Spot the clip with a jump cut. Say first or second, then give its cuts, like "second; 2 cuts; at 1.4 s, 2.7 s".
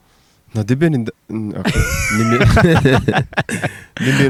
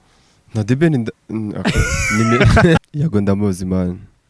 second; 1 cut; at 2.8 s